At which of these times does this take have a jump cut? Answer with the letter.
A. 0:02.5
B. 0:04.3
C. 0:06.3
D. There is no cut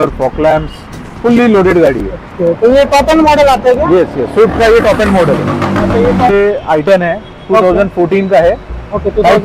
C